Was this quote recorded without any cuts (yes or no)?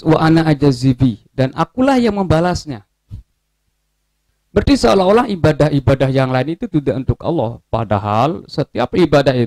yes